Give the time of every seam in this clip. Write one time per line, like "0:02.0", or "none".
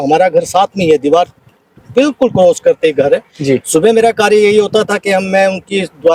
none

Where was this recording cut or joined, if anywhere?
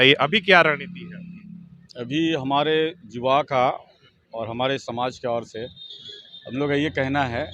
none

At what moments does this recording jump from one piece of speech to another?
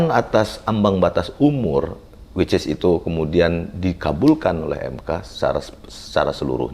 none

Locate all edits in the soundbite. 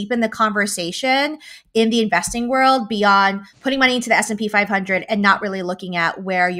none

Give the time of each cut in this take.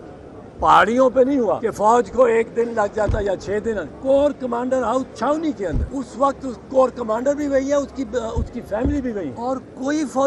0:01.5
0:03.9
0:05.8
0:09.3

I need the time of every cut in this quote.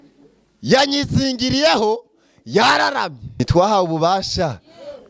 0:03.2

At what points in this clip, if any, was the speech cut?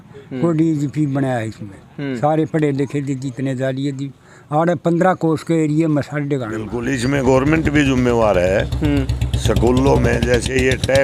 0:06.8

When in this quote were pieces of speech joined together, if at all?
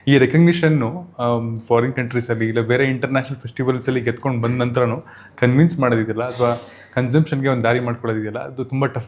none

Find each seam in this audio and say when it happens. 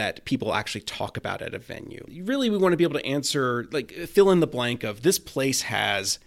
0:02.1

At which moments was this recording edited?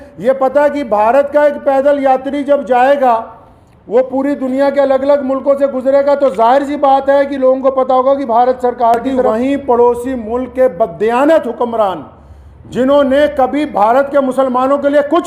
0:09.3

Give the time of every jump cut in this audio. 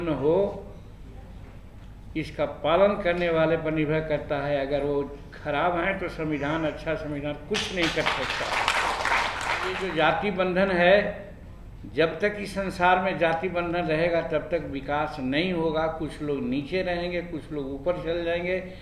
0:09.8

